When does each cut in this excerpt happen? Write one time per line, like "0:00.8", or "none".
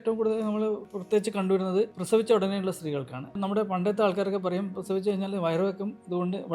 0:00.9
0:02.0
0:03.4